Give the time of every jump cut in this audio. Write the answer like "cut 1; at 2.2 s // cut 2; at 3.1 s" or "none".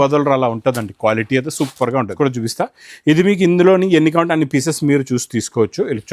cut 1; at 2.1 s